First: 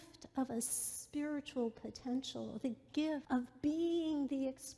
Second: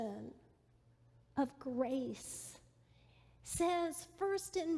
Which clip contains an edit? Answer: first; 1 cut; at 3.2 s

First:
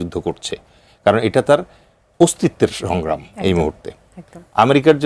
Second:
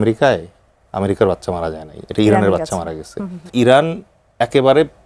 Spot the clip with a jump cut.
second; 1 cut; at 3.4 s

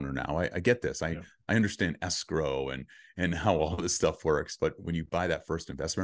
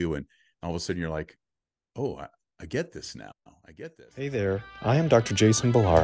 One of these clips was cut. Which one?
second; 1 cut; at 4.2 s

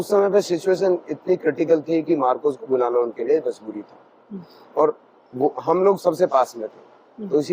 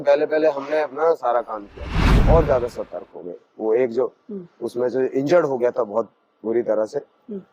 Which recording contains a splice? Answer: second; 1 cut; at 2.1 s

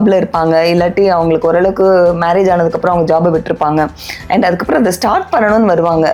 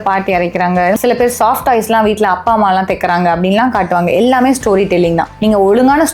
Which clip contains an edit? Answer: second; 2 cuts; at 1.0 s, 5.3 s

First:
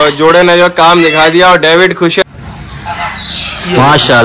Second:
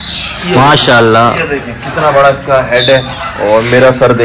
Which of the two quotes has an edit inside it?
first; 1 cut; at 2.2 s

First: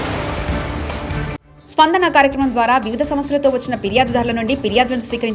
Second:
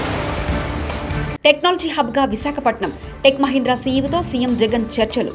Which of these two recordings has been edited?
second; 1 cut; at 1.3 s

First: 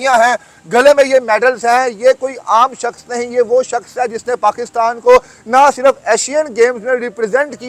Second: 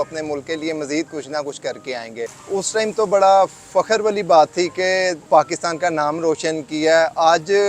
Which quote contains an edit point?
second; 2 cuts; at 2.4 s, 5.2 s

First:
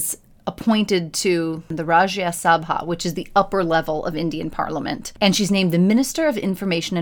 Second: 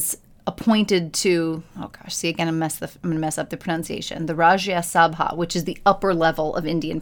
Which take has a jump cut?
first; 2 cuts; at 1.7 s, 5.1 s

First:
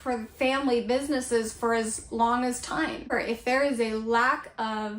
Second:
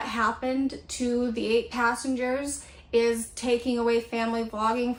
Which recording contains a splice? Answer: first; 1 cut; at 3.1 s

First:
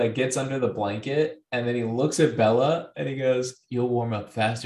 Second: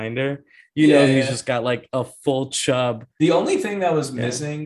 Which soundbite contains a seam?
second; 1 cut; at 3.1 s

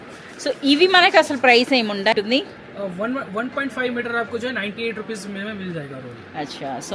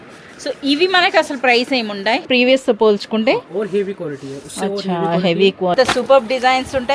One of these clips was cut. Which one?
second; 2 cuts; at 2.3 s, 5.7 s

